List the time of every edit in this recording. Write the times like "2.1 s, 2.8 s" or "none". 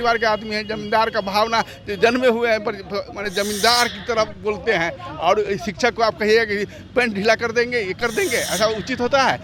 none